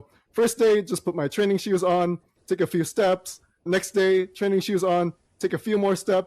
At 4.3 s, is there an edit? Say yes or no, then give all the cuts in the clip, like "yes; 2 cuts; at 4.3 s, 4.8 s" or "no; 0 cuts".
no; 0 cuts